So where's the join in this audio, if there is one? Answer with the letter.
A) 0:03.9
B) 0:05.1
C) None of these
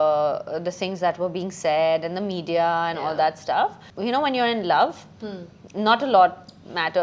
A